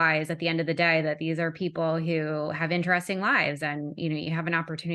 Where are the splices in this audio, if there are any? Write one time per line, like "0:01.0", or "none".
none